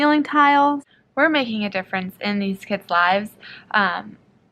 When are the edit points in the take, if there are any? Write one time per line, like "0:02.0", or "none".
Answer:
0:01.0